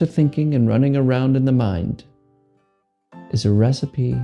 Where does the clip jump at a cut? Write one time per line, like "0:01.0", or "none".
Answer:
none